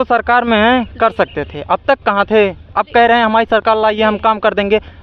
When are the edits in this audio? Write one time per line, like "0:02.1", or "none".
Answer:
none